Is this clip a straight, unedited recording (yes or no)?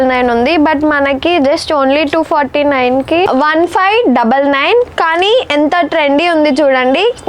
no